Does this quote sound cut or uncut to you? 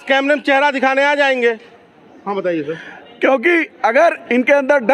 uncut